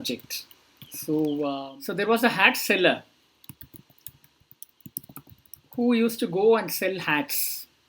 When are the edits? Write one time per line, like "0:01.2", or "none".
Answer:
0:01.6